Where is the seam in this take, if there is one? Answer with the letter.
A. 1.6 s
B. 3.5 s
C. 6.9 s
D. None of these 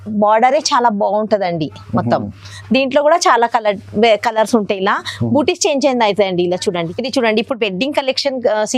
C